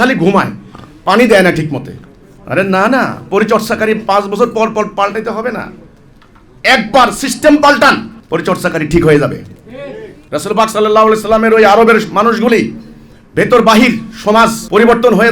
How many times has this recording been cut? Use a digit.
1